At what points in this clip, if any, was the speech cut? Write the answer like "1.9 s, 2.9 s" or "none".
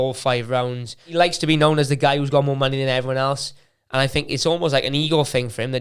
1.1 s